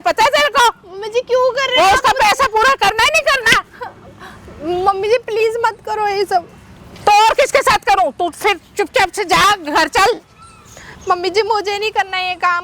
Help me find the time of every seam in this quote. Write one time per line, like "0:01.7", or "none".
none